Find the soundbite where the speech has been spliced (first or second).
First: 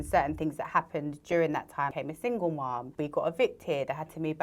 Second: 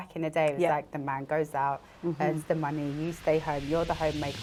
first